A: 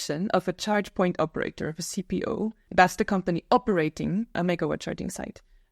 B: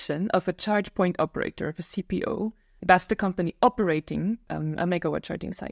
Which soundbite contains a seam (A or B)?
A